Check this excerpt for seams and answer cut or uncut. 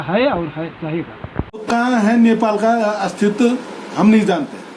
cut